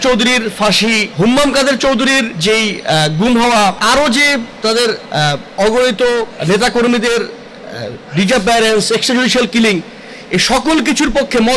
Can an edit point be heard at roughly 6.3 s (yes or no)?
yes